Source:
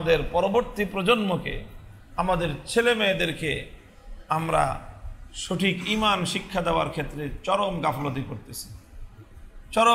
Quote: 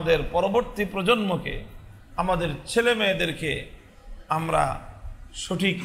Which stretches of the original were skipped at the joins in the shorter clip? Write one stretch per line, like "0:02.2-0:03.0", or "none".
none